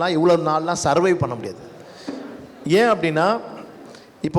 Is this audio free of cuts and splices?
yes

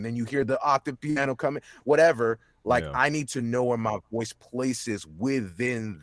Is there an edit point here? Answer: no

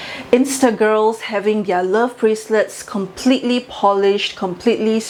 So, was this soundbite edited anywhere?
no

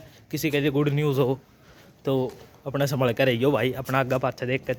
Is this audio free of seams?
yes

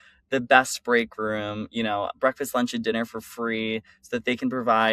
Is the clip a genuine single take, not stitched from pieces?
yes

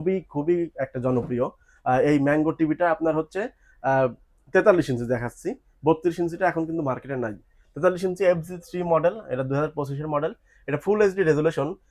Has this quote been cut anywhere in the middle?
no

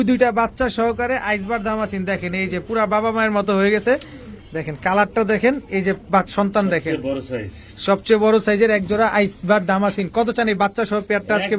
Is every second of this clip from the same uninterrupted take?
yes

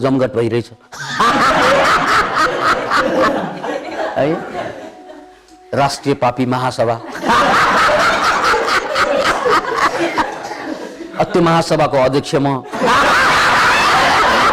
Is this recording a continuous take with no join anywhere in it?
yes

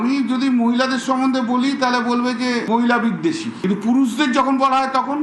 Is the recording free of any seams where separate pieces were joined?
yes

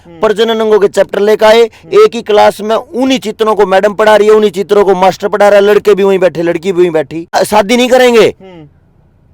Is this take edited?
yes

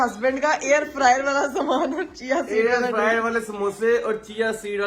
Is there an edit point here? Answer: no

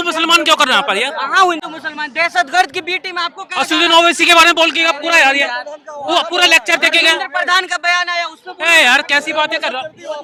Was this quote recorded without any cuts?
yes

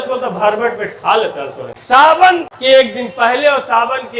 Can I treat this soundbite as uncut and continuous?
no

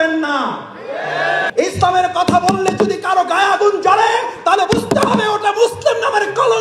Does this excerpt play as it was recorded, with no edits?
no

